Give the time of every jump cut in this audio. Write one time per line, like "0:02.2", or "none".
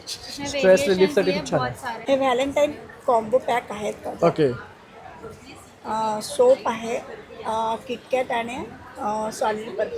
0:01.9